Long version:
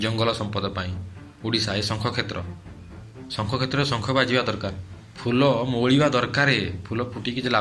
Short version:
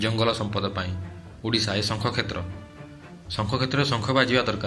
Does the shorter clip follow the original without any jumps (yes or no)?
yes